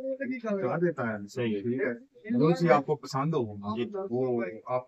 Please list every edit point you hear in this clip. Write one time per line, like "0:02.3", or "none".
none

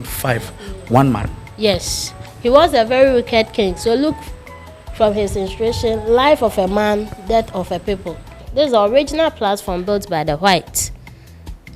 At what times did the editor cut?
0:08.4

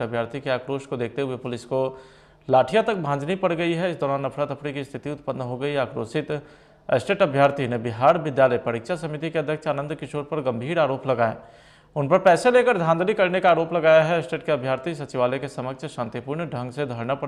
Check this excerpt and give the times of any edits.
none

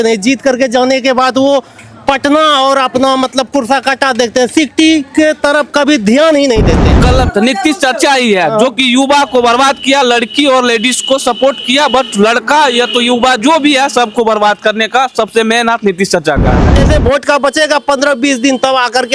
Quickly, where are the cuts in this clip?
0:07.0
0:16.7

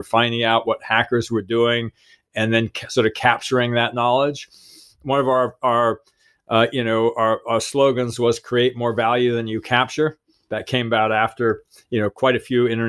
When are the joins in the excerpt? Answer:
none

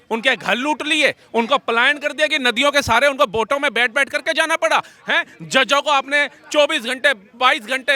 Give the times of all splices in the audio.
none

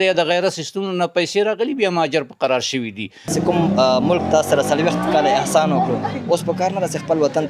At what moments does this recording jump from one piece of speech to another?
0:03.3

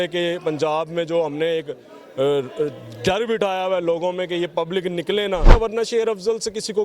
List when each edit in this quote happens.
0:05.5

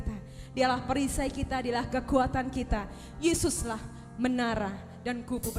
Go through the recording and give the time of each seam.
none

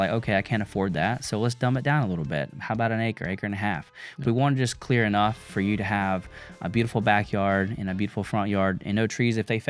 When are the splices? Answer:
none

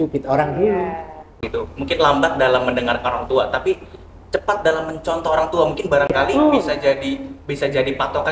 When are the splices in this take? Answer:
0:01.3

